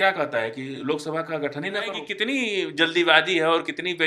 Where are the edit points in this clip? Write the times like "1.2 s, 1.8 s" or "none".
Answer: 2.1 s